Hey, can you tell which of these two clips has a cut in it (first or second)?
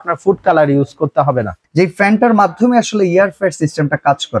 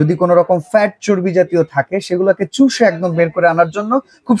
first